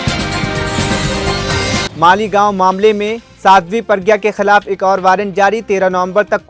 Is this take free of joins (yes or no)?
no